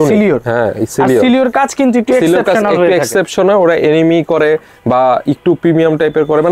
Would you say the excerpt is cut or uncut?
uncut